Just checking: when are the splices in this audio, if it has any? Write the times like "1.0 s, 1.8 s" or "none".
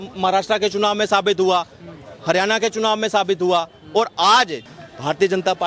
4.6 s